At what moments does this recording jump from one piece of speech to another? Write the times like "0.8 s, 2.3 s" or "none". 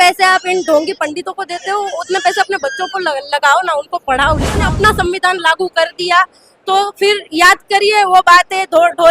4.6 s